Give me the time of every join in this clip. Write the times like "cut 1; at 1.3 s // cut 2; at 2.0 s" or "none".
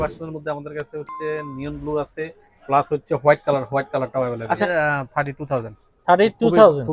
cut 1; at 4.6 s